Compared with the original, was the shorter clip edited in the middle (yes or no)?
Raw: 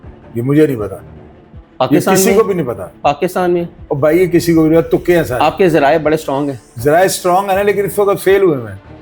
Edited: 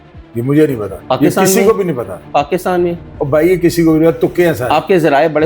yes